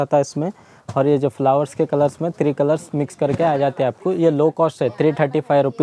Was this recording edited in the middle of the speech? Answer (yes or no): no